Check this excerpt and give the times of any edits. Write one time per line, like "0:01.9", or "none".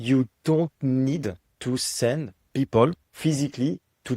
0:01.5
0:02.4
0:03.1